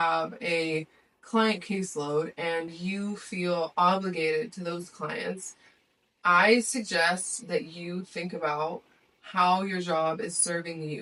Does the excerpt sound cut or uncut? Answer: uncut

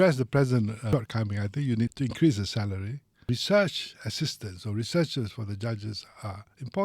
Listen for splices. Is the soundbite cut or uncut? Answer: cut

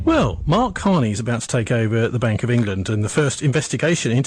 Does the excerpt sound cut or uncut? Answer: uncut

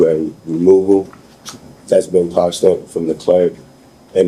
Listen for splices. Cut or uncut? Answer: uncut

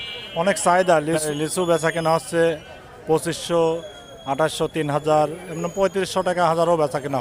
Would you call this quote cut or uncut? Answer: cut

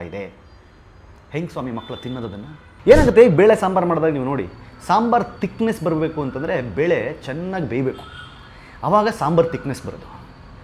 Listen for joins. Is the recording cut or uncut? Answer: cut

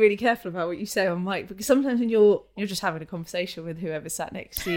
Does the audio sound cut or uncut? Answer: cut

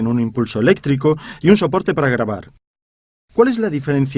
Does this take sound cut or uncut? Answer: uncut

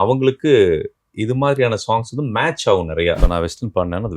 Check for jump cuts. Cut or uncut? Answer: cut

